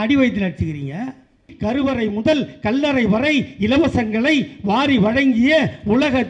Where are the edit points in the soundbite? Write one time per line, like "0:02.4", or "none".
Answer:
0:01.5